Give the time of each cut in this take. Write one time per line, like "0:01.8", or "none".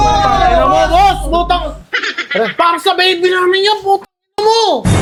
none